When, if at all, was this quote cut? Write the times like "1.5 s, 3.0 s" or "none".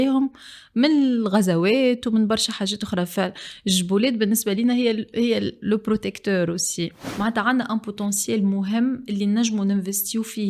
7.0 s

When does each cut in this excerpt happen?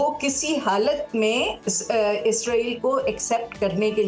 none

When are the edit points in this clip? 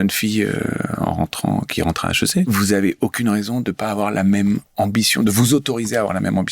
2.5 s

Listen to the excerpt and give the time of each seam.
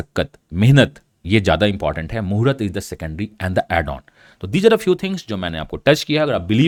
none

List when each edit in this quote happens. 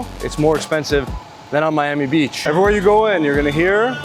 2.4 s

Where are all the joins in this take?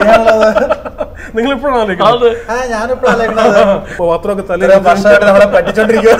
3.9 s

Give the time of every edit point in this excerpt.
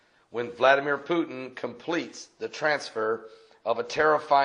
1.5 s

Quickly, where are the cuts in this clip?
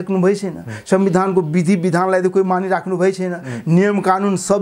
none

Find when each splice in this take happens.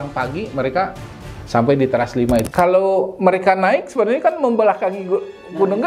2.5 s

